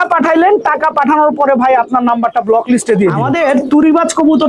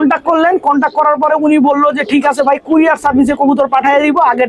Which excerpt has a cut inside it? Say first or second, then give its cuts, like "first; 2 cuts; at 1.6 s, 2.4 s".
first; 1 cut; at 3.2 s